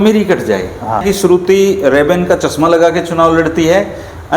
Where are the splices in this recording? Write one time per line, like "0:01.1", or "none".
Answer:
0:01.0